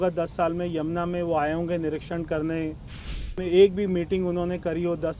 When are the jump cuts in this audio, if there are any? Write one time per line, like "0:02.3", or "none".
0:03.3